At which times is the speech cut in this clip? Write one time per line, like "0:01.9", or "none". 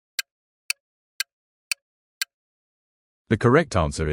0:02.5